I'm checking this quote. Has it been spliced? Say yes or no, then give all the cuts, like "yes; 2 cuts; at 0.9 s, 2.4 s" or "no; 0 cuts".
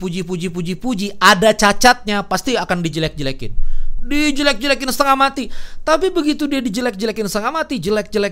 no; 0 cuts